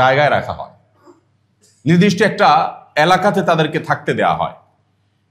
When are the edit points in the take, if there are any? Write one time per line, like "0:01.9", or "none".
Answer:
none